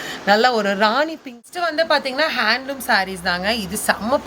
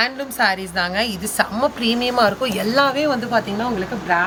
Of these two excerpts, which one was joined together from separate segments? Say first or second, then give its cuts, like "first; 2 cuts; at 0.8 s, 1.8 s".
first; 1 cut; at 1.4 s